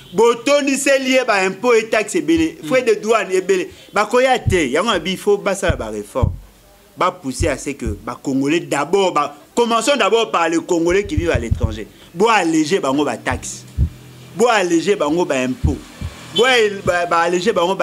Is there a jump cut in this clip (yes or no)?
no